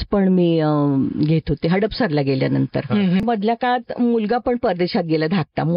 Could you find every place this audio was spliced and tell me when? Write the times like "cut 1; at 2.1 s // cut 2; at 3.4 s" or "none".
cut 1; at 3.2 s